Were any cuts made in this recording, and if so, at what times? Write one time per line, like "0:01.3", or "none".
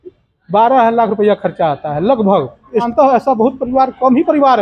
0:02.9